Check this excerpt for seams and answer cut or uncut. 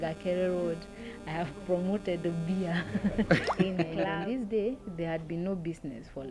cut